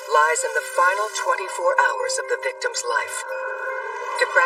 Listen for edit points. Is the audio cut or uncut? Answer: uncut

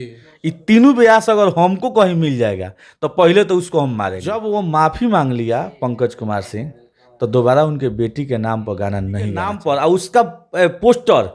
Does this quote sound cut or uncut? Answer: cut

